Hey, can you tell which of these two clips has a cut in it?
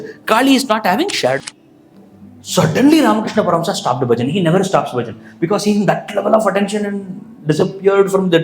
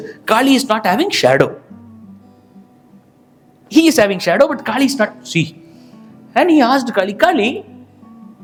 first; 1 cut; at 1.4 s

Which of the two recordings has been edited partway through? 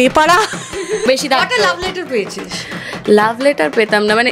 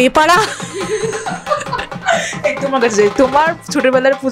first; 1 cut; at 1.1 s

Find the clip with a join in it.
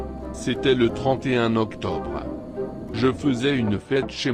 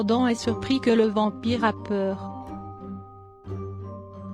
second; 1 cut; at 2.1 s

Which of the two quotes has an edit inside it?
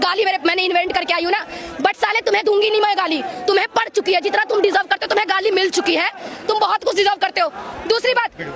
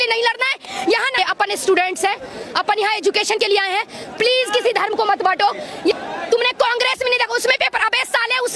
second; 2 cuts; at 1.2 s, 6.0 s

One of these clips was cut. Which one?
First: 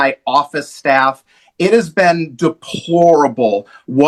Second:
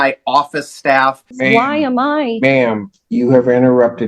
second; 1 cut; at 1.4 s

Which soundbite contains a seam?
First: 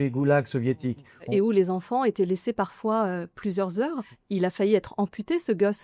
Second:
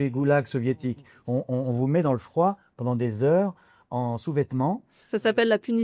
first; 2 cuts; at 1.3 s, 4.1 s

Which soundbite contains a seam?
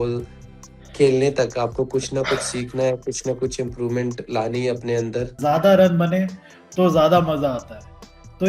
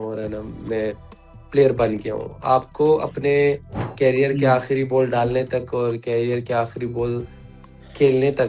first; 1 cut; at 5.4 s

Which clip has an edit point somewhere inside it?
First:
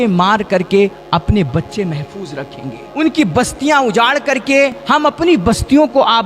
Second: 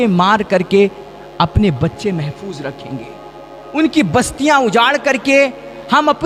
first; 3 cuts; at 1.0 s, 2.8 s, 4.8 s

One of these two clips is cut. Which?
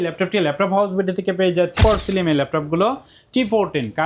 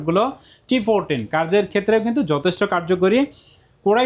first; 1 cut; at 1.7 s

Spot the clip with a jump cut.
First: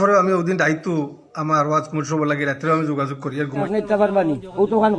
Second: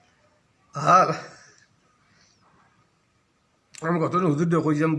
first; 1 cut; at 3.6 s

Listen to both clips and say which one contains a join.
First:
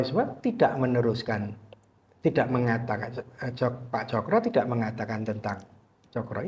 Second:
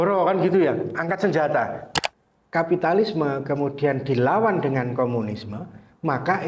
second; 1 cut; at 1.8 s

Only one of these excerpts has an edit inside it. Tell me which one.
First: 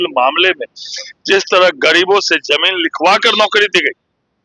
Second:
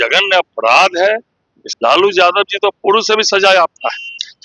second; 1 cut; at 1.6 s

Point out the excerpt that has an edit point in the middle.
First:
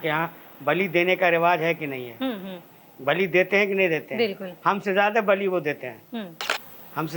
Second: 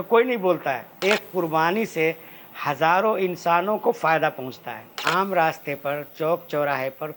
second; 2 cuts; at 0.9 s, 5.0 s

